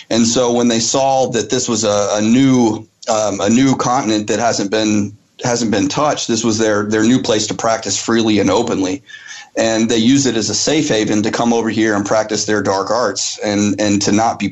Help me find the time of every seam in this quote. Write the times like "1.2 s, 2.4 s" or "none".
none